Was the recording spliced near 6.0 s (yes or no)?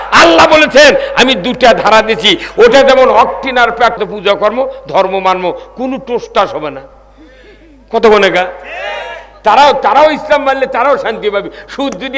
no